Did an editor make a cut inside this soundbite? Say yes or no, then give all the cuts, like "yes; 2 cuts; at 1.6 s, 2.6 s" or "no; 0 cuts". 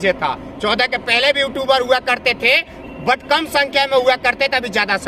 no; 0 cuts